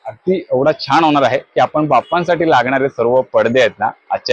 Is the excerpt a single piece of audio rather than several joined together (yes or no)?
yes